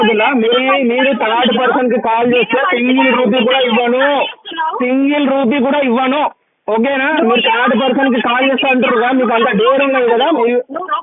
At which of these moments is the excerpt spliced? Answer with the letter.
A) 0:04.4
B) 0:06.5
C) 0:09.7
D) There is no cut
D